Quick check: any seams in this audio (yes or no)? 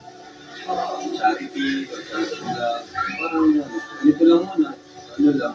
no